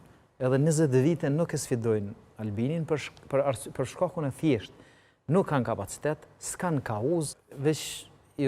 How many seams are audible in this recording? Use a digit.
1